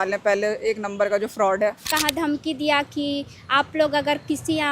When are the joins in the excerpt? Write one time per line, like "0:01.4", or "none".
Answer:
0:01.9